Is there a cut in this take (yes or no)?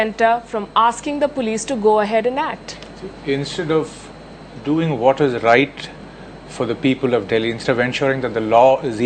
yes